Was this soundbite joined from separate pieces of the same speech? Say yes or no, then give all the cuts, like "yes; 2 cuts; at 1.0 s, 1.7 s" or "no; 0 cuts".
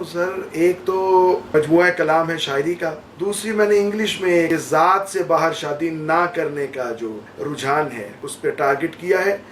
yes; 5 cuts; at 1.5 s, 3.1 s, 4.5 s, 7.3 s, 8.3 s